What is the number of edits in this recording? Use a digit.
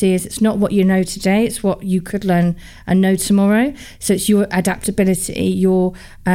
0